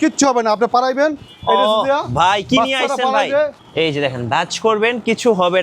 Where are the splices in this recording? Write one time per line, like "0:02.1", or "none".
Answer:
0:03.6